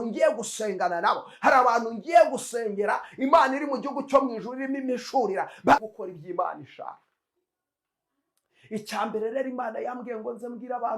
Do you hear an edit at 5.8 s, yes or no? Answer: yes